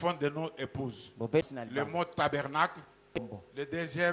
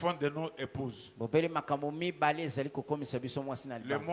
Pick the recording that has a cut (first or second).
first